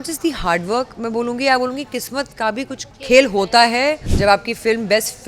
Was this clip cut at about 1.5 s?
no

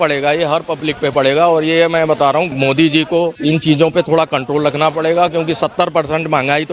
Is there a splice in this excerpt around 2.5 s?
yes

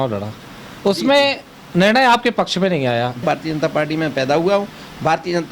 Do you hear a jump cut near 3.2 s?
yes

